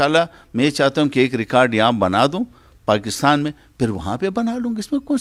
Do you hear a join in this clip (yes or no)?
no